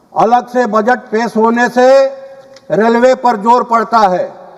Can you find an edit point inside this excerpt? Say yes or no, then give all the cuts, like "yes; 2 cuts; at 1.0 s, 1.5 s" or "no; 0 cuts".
no; 0 cuts